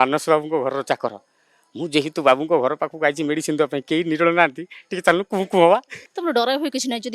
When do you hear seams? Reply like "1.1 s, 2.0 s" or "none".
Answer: 6.0 s